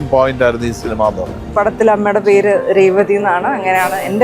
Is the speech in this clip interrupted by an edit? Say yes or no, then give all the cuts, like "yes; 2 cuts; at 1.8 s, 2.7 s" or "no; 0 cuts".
yes; 1 cut; at 1.5 s